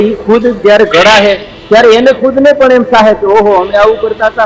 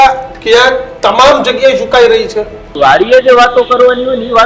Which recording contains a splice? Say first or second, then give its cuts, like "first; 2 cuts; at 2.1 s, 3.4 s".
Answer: second; 1 cut; at 2.8 s